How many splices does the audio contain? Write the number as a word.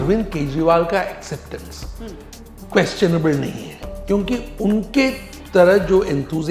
zero